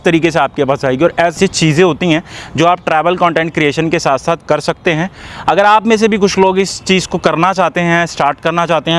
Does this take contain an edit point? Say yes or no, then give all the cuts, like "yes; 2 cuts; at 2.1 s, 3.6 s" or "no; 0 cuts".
yes; 1 cut; at 1.3 s